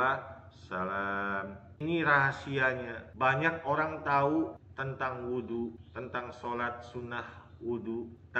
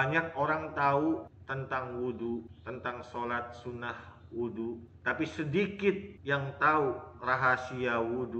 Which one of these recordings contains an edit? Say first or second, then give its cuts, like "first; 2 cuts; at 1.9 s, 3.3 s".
first; 1 cut; at 1.8 s